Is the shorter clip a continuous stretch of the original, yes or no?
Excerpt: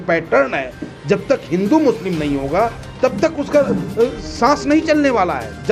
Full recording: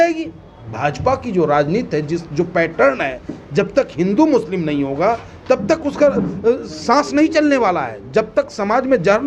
yes